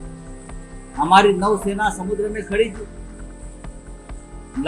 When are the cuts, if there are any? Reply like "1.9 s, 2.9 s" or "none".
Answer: 0.9 s